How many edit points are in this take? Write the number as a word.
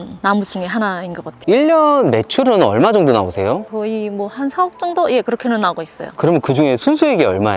one